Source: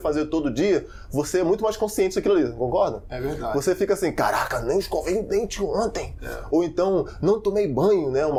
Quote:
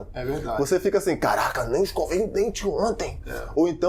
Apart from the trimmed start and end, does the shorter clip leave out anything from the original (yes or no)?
no